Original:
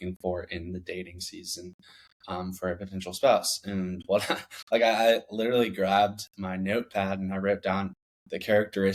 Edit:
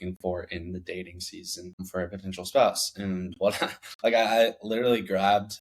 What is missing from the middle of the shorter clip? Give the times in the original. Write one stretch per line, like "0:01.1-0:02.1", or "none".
0:01.8-0:02.5